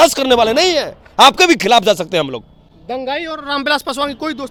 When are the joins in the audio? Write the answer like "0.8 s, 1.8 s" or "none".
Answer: none